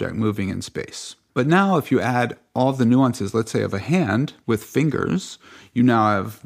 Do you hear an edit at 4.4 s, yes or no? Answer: yes